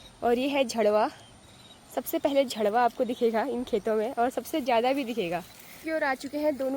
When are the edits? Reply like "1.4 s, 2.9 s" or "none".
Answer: 5.8 s